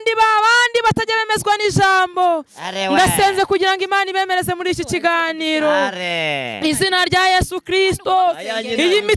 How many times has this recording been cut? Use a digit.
0